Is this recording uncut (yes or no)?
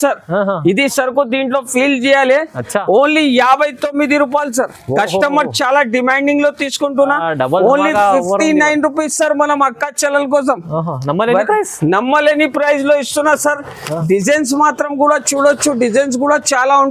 yes